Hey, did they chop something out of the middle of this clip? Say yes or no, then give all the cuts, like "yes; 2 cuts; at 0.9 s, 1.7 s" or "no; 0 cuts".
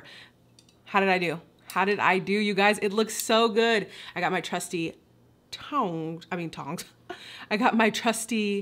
no; 0 cuts